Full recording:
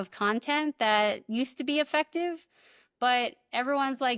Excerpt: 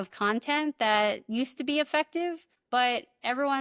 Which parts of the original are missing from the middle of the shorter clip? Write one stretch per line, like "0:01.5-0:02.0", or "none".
0:02.5-0:02.8